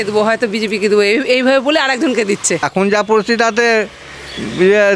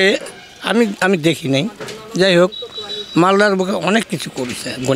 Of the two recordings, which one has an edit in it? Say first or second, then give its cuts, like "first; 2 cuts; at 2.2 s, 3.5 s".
first; 1 cut; at 2.6 s